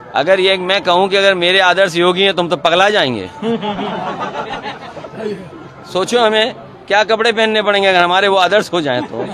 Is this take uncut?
yes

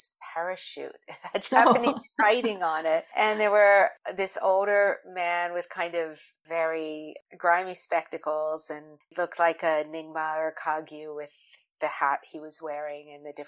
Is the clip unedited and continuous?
no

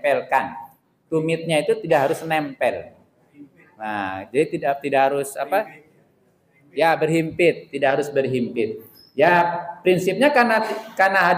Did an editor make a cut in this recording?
no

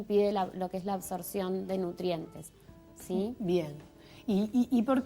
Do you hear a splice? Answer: yes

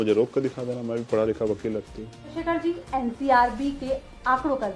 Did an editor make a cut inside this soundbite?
yes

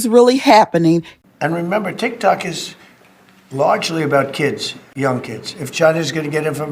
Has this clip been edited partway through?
yes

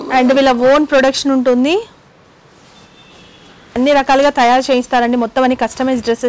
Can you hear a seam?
no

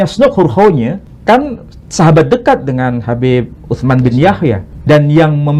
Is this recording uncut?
no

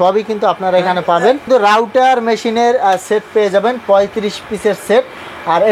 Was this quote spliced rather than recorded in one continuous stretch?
yes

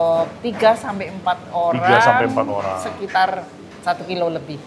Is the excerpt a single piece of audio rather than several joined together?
yes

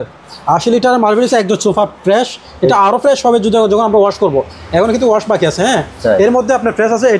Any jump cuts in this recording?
no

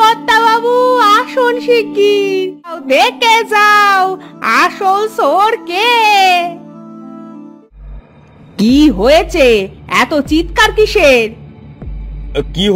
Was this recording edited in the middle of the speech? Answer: yes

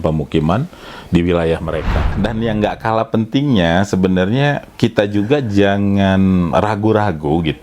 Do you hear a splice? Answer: yes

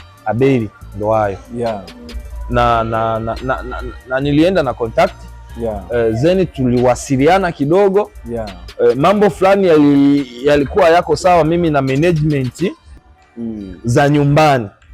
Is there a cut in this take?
yes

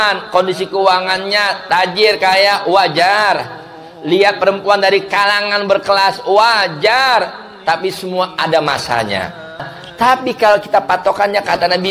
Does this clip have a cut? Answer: yes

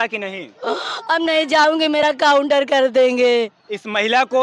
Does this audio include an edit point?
no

